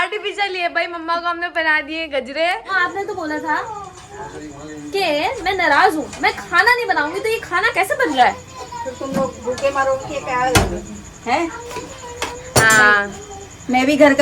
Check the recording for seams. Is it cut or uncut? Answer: cut